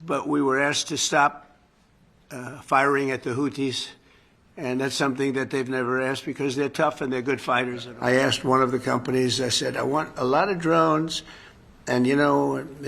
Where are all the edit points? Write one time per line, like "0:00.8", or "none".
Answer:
0:07.8